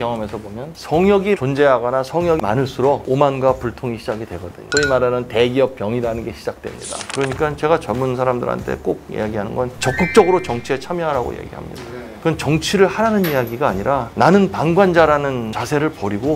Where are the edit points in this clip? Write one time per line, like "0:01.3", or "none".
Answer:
0:07.0